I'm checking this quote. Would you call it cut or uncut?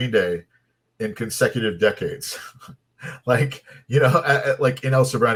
uncut